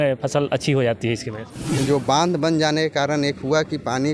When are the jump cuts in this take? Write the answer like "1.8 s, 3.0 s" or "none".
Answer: 1.6 s

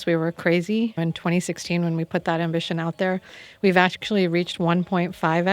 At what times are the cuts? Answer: 1.0 s

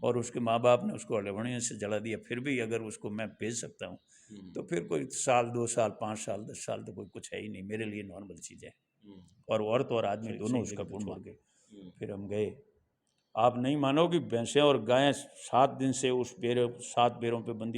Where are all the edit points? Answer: 11.1 s

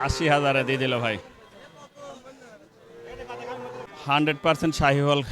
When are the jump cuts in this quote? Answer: 3.9 s

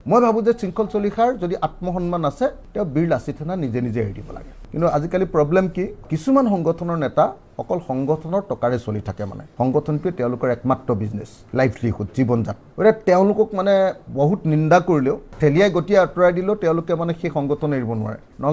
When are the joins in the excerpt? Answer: 4.5 s, 6.1 s, 15.3 s

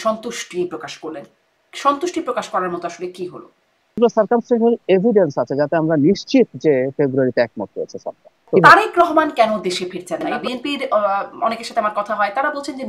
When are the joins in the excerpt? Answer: 4.0 s, 8.5 s, 10.3 s

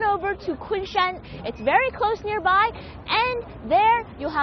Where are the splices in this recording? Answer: 1.5 s

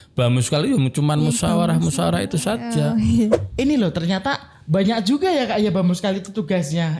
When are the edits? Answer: 3.3 s

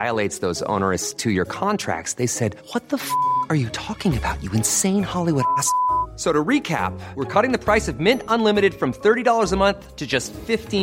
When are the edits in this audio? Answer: none

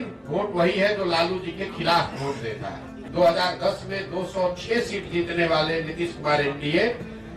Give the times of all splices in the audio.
3.0 s

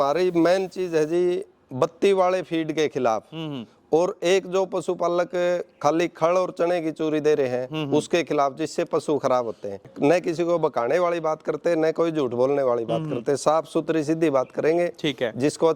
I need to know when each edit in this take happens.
9.9 s

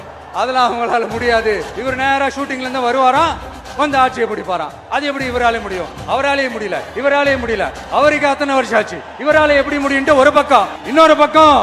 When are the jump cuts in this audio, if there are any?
1.7 s

